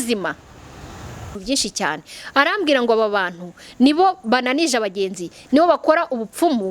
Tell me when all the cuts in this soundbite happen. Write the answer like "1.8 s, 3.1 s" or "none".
1.4 s